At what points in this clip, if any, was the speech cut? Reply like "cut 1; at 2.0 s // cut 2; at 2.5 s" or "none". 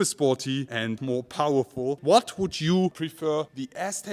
cut 1; at 1.0 s // cut 2; at 2.0 s